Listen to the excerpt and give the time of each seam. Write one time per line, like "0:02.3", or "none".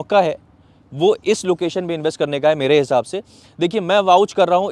none